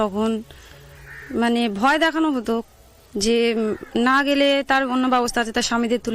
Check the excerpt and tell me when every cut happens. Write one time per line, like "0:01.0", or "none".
0:04.2